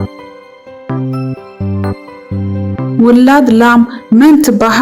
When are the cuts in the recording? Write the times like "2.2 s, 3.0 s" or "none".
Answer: none